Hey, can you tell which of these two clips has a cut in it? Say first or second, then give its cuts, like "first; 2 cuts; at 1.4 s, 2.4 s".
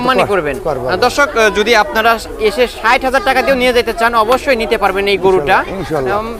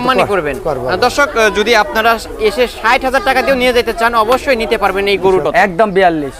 second; 1 cut; at 5.4 s